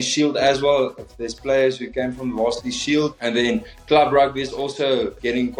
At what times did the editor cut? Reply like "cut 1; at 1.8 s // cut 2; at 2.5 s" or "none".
none